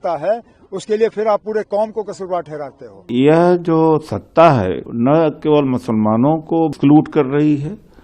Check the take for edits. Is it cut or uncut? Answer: cut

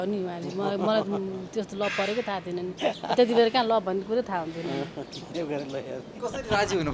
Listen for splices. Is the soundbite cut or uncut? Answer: uncut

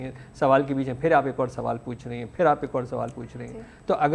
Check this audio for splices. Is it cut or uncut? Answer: uncut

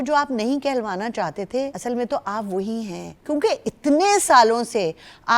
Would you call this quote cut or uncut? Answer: cut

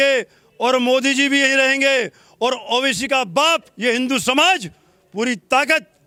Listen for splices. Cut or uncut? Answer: uncut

